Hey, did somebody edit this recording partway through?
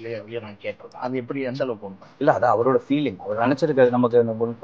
no; 0 cuts

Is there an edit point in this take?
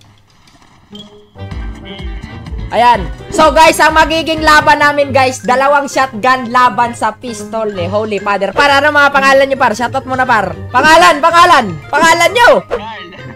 yes; 2 cuts; at 10.6 s, 11.8 s

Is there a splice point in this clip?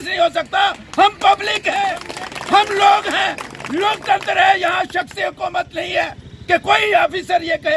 no; 0 cuts

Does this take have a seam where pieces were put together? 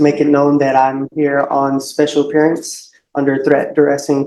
no; 0 cuts

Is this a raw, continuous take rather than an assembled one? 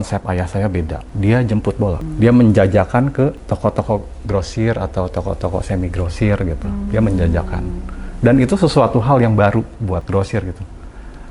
no; 4 cuts; at 1.0 s, 2.1 s, 3.4 s, 10.1 s

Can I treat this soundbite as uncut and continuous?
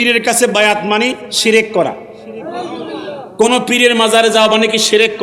yes; 0 cuts

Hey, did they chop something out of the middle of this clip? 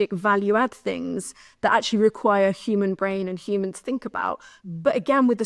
no; 0 cuts

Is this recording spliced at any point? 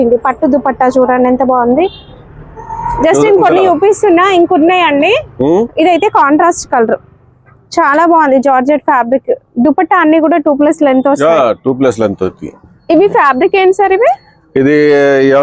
no; 0 cuts

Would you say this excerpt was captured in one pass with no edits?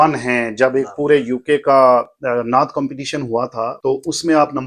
no; 1 cut; at 3.8 s

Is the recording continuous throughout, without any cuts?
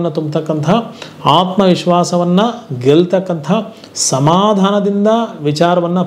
yes; 0 cuts

